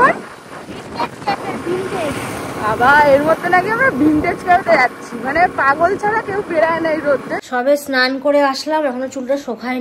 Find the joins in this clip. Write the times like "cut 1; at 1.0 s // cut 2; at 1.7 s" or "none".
cut 1; at 7.3 s